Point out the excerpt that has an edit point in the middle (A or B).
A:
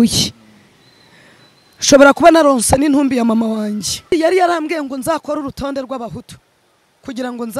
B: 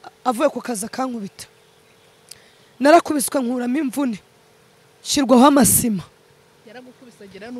A